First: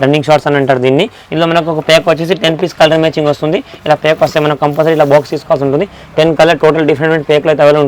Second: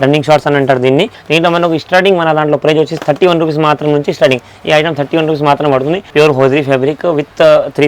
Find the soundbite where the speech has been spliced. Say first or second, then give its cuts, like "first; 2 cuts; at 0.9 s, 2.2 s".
second; 2 cuts; at 1.2 s, 6.0 s